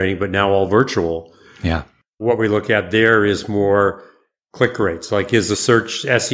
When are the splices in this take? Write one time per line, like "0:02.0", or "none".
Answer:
none